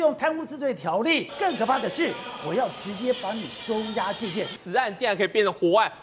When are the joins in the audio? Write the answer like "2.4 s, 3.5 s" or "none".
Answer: 1.3 s, 4.6 s